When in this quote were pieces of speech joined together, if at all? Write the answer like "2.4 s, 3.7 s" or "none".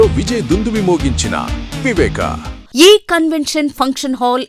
2.5 s

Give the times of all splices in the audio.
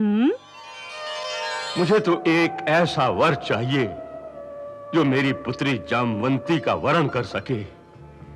1.6 s

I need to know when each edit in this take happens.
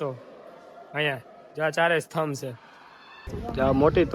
3.2 s

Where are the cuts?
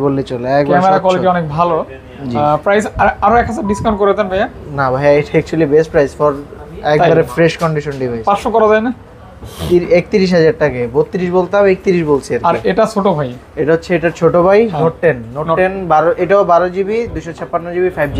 none

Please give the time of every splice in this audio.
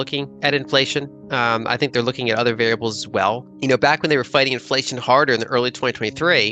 3.5 s

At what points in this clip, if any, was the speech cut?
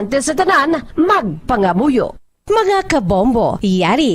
2.2 s

